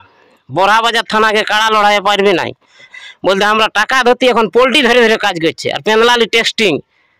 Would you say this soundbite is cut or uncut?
cut